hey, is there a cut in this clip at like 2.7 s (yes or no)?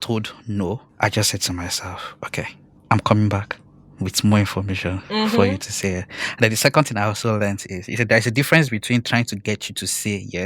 yes